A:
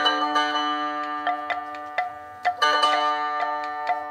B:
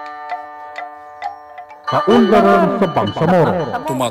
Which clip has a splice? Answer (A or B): B